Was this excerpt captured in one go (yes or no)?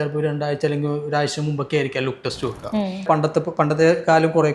no